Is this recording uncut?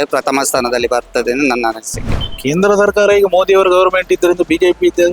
no; 1 cut; at 2.2 s

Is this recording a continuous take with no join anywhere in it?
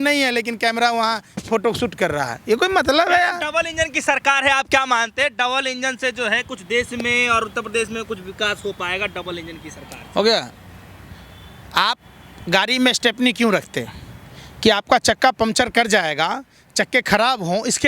yes; 0 cuts

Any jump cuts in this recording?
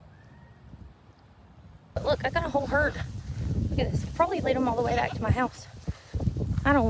yes; 1 cut; at 2.0 s

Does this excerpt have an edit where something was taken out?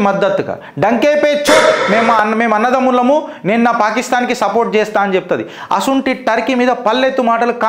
no; 0 cuts

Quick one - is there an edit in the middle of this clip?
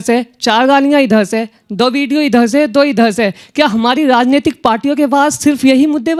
no; 0 cuts

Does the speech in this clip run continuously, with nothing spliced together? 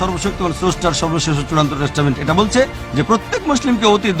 yes; 0 cuts

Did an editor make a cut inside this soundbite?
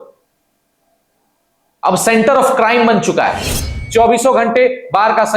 yes; 1 cut; at 3.8 s

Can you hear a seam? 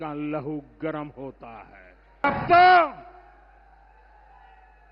yes; 1 cut; at 2.2 s

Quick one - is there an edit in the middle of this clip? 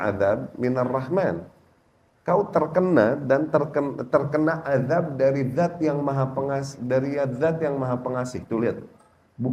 no; 0 cuts

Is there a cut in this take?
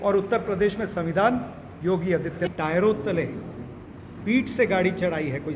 yes; 1 cut; at 2.5 s

